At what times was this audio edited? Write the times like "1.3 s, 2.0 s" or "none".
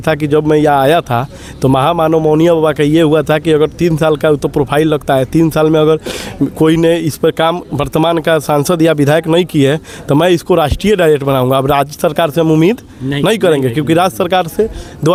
none